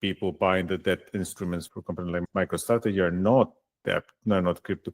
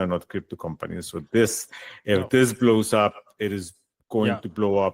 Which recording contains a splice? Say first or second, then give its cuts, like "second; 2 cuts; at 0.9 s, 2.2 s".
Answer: first; 1 cut; at 2.0 s